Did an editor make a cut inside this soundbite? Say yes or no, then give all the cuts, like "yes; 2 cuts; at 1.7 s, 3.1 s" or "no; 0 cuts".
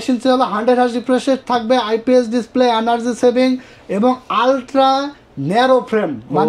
no; 0 cuts